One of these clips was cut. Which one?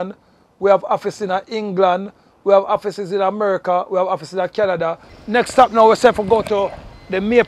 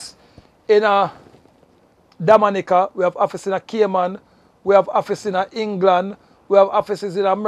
first; 1 cut; at 5.1 s

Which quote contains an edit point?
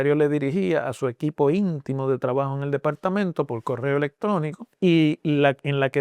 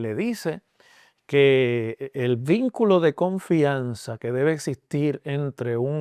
first; 1 cut; at 4.7 s

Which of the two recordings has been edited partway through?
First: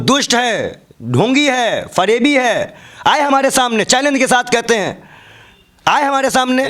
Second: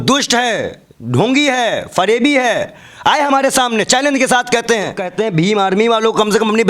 second; 1 cut; at 5.1 s

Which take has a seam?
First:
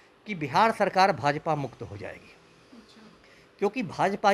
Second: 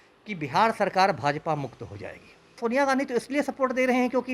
second; 1 cut; at 2.6 s

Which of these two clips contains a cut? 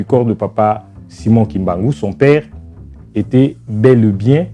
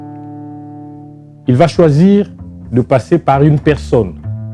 second; 1 cut; at 1.1 s

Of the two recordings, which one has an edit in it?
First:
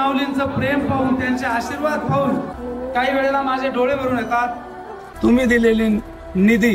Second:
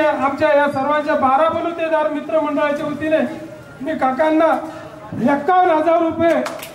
first; 2 cuts; at 2.5 s, 5.0 s

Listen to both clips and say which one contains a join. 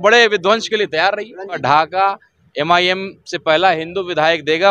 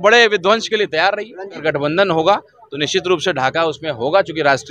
second; 1 cut; at 1.6 s

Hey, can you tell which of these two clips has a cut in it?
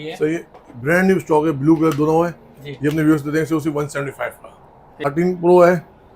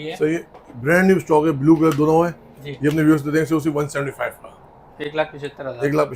first; 1 cut; at 5.0 s

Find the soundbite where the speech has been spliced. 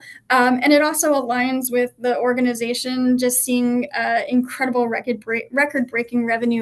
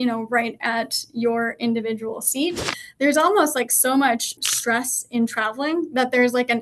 second; 2 cuts; at 2.8 s, 4.4 s

